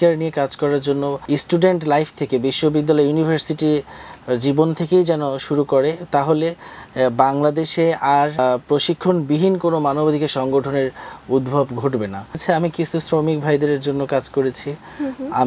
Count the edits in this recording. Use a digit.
3